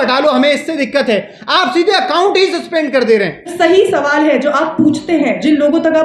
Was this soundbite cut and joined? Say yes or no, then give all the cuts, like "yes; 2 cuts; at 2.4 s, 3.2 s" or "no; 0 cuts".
yes; 1 cut; at 3.5 s